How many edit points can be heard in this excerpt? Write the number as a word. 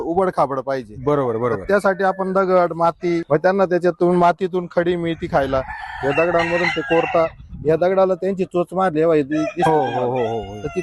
one